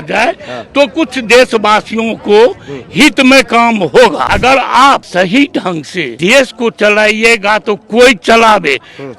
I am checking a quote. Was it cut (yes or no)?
yes